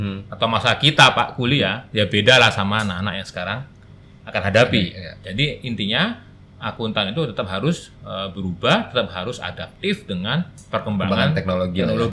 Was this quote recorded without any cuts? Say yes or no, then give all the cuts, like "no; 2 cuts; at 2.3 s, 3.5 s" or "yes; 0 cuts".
yes; 0 cuts